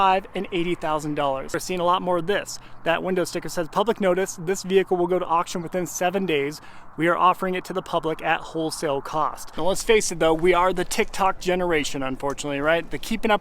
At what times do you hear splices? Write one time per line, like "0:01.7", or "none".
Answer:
0:01.5
0:09.5